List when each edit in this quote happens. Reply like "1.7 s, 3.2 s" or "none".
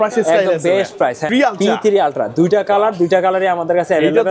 1.2 s

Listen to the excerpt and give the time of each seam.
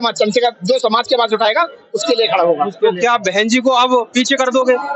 none

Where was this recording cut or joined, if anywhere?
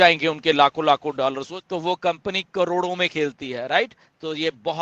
1.5 s

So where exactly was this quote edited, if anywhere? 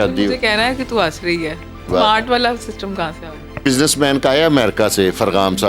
1.9 s, 3.6 s

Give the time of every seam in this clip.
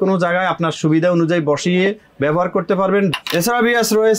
3.1 s

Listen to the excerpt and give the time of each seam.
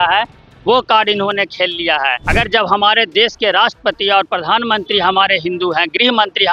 2.2 s

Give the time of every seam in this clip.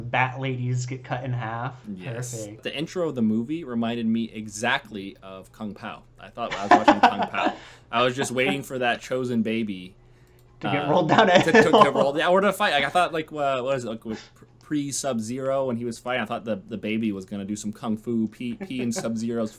2.6 s

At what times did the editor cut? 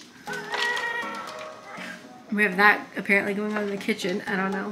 none

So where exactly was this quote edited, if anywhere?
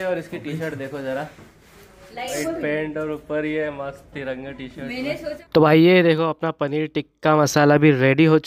2.4 s, 5.4 s

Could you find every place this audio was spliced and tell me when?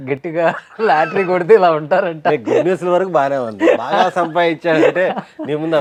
none

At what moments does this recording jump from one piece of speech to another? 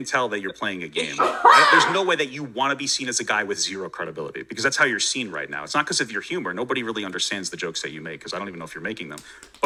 none

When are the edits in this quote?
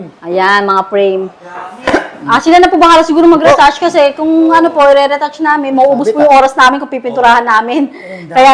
none

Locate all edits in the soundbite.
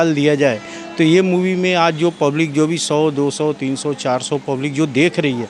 none

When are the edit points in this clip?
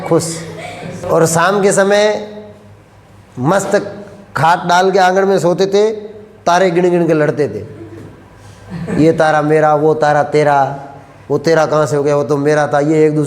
1.0 s

